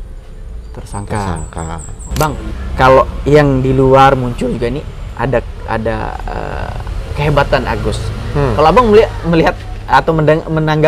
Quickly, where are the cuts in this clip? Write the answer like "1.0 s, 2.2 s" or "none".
2.0 s